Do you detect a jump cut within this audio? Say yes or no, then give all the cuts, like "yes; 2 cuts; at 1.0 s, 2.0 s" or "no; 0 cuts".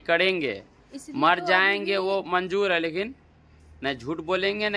no; 0 cuts